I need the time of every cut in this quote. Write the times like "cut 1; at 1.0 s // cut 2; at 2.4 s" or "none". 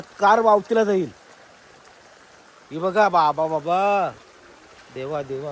none